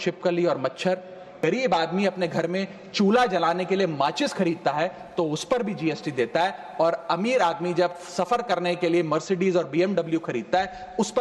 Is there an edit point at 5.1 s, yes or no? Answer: no